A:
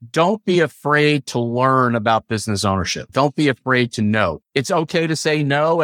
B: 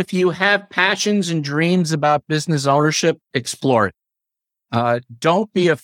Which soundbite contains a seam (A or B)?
A